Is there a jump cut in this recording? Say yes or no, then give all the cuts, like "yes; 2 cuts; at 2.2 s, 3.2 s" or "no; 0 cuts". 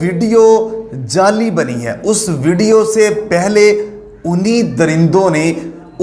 no; 0 cuts